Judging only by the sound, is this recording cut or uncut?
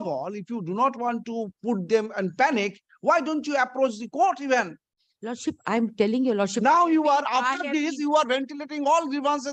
uncut